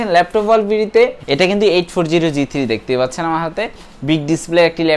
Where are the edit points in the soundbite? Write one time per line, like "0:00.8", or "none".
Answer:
0:01.2

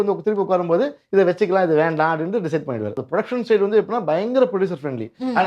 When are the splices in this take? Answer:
0:03.0

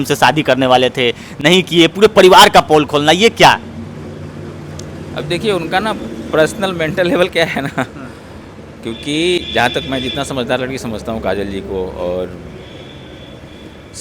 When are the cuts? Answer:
none

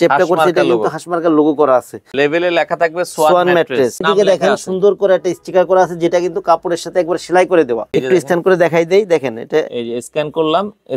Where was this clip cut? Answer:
0:02.1
0:04.0
0:07.9

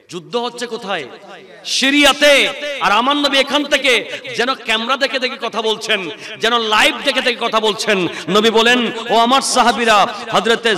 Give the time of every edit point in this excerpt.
none

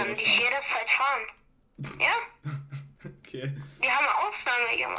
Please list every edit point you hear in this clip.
none

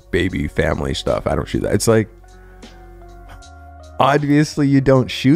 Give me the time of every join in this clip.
none

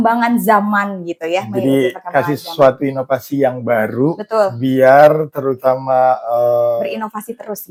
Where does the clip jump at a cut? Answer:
none

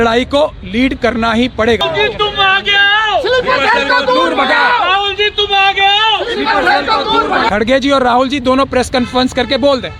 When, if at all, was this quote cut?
0:01.8
0:07.5

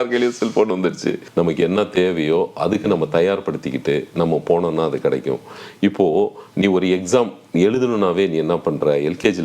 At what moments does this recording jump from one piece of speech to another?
0:01.2

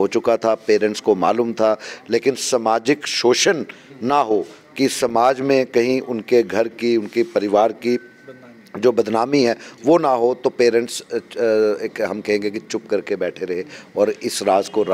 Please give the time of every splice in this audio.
none

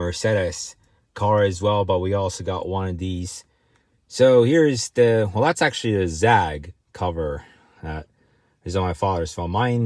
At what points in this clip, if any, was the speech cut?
none

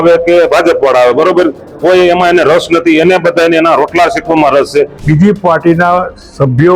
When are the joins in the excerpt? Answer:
0:05.0

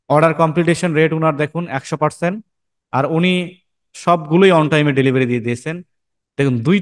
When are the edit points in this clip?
none

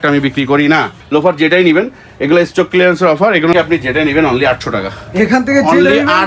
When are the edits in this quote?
0:00.9
0:03.5

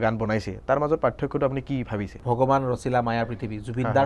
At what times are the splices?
0:02.1

